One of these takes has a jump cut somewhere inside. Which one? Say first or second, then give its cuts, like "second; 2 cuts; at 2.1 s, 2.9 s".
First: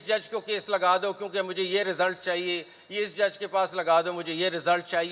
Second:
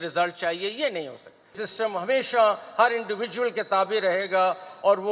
second; 1 cut; at 1.6 s